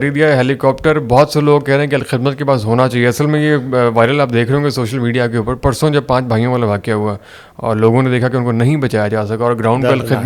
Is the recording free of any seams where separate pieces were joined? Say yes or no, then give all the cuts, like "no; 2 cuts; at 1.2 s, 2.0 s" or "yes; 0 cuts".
yes; 0 cuts